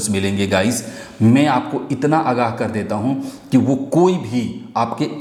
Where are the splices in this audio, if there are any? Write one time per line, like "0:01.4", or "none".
none